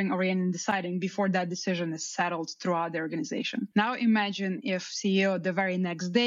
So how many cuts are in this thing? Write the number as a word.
zero